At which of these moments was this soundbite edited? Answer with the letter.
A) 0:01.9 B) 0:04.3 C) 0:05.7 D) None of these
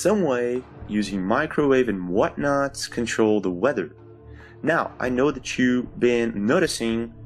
A